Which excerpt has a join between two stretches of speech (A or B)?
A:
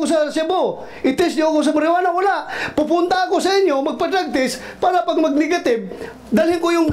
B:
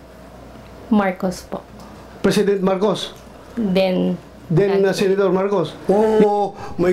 B